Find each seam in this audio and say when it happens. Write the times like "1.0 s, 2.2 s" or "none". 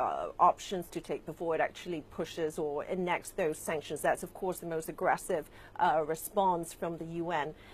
2.1 s